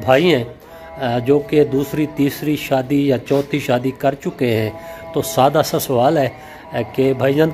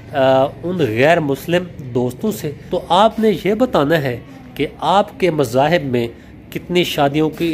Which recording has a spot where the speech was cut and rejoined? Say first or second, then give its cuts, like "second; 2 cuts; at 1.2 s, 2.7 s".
second; 1 cut; at 2.7 s